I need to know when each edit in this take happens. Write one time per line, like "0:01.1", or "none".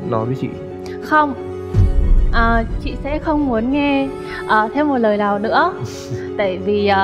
none